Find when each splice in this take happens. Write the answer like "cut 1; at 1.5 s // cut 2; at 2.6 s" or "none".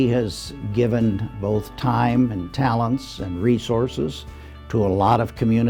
none